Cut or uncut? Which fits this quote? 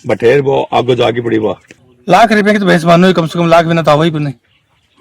cut